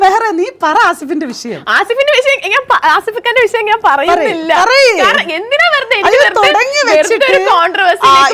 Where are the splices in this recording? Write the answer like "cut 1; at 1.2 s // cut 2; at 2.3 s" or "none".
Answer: none